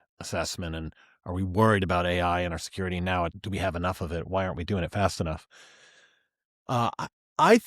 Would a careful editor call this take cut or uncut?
cut